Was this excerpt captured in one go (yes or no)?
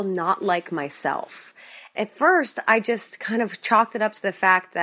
yes